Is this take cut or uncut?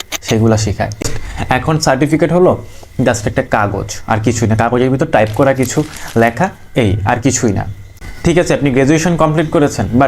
cut